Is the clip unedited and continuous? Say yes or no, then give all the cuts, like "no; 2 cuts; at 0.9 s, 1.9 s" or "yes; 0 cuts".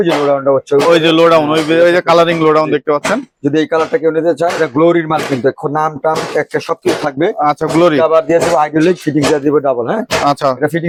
yes; 0 cuts